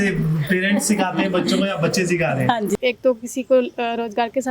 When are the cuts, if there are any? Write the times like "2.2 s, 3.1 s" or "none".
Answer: 2.7 s